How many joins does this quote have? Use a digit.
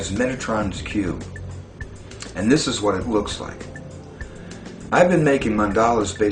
1